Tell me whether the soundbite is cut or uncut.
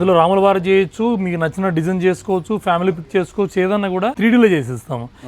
cut